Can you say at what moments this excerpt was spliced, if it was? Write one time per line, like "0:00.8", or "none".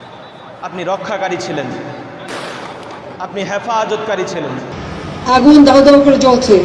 0:04.7